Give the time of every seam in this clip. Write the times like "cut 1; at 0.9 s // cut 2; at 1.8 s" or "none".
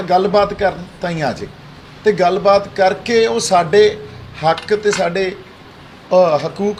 none